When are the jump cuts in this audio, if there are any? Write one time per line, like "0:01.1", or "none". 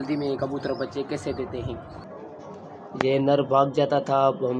0:02.2